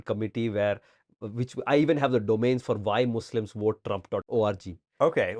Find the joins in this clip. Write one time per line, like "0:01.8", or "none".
0:04.2